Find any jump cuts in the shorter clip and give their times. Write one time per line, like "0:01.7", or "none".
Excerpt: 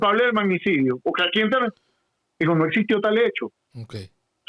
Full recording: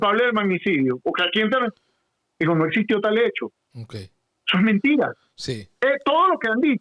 none